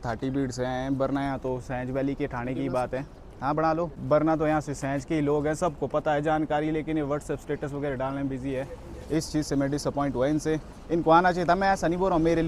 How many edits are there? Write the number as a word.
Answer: zero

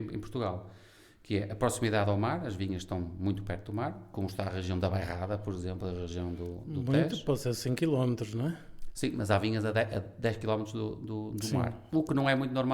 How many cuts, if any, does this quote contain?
zero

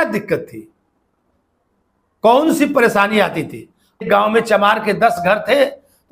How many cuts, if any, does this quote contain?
one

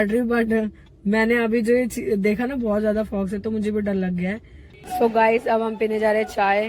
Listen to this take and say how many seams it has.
one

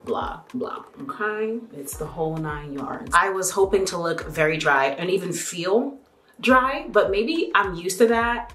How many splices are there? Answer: one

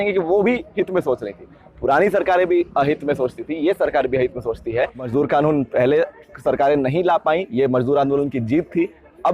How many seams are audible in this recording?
one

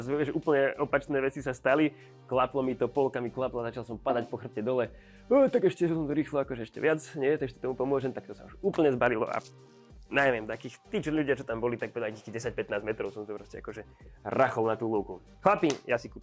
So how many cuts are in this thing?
one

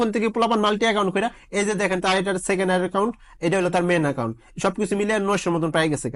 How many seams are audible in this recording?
zero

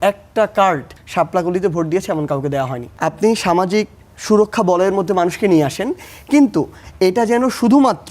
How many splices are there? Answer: two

